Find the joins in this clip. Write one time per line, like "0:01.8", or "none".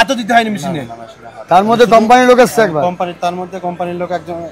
none